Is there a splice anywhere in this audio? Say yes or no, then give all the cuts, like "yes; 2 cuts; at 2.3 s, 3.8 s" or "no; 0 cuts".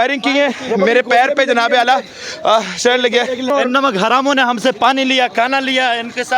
yes; 1 cut; at 3.5 s